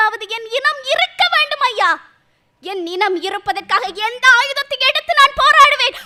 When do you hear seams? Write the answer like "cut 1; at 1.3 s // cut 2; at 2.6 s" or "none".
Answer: none